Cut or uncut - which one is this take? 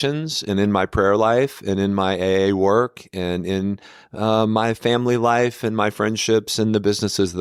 uncut